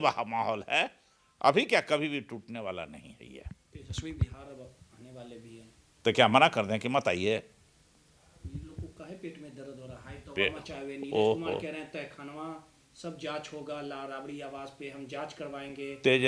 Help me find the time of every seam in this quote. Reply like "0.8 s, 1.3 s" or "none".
none

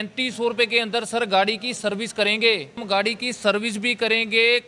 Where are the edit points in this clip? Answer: 2.8 s

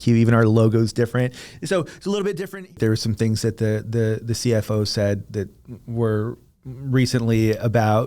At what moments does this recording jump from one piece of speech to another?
2.8 s

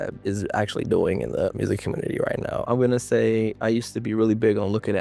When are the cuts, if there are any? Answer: 2.6 s

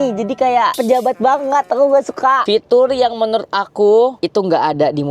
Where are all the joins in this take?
2.4 s

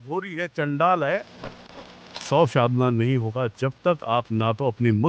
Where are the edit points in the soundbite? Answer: 1.6 s

